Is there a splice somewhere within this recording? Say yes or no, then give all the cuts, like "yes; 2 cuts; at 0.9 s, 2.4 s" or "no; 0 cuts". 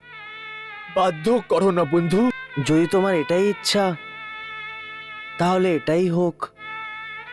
yes; 1 cut; at 2.5 s